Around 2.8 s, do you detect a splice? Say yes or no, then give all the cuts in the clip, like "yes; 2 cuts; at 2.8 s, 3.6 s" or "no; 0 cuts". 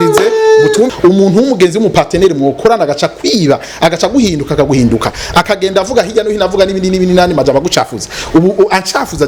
no; 1 cut; at 0.9 s